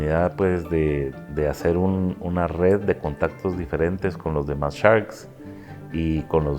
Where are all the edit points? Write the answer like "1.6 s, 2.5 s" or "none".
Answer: 1.2 s